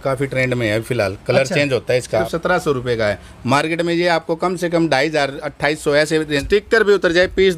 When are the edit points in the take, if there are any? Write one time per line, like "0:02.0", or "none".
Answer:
0:02.2
0:06.4